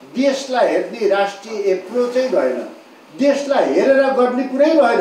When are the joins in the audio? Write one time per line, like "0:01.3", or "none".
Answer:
none